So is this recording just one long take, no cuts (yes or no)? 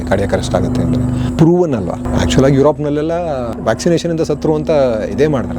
no